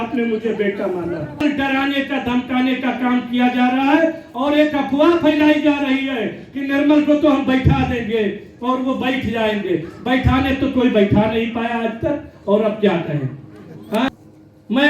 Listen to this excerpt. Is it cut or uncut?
cut